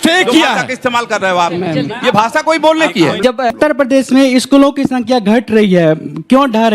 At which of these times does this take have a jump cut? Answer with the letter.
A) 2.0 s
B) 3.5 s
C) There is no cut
B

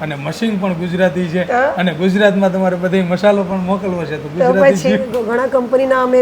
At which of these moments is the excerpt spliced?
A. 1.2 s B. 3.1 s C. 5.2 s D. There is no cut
C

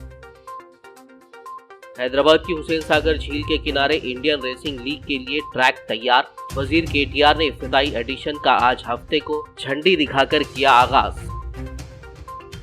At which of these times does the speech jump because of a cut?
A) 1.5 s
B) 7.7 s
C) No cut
C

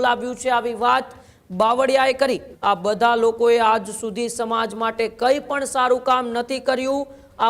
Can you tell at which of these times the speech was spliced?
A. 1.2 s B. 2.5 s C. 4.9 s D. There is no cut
B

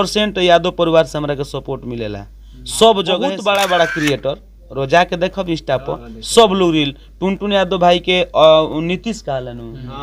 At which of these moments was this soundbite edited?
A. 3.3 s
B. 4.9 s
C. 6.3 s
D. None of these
A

